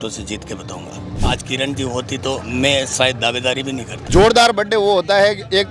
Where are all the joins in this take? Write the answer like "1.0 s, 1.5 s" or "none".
1.1 s, 3.9 s

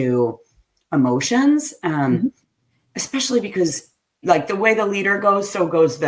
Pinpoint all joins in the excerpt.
none

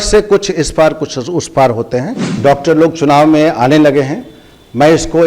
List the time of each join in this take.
2.3 s

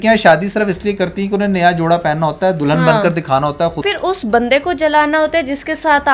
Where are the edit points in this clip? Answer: 3.9 s

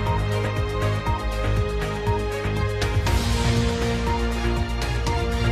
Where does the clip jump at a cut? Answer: 2.9 s

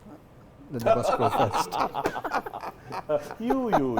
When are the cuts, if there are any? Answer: none

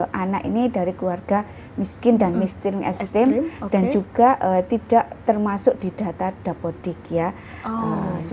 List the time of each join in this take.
none

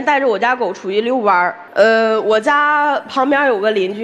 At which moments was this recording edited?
1.6 s

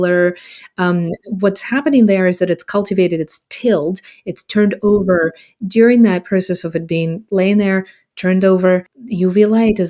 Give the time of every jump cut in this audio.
9.0 s

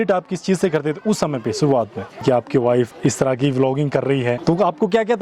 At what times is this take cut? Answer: 2.2 s, 2.9 s, 4.4 s

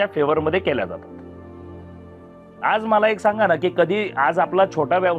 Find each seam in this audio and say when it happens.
none

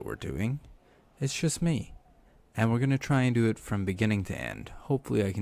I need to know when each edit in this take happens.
none

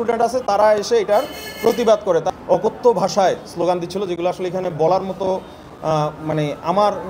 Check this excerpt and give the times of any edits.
2.3 s

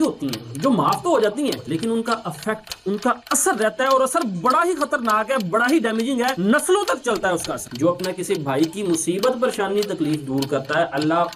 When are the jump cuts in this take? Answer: 7.6 s

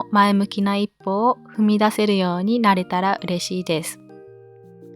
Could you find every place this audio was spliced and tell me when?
3.9 s

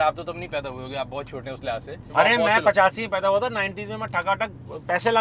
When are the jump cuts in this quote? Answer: 2.0 s

